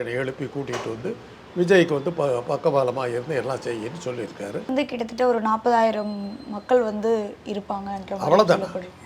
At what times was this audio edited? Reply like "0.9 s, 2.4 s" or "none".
4.6 s